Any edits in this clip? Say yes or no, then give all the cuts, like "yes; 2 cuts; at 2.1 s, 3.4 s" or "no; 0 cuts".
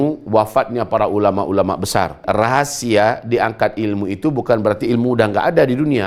yes; 1 cut; at 2.2 s